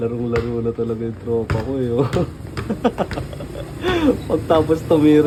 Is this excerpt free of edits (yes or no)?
yes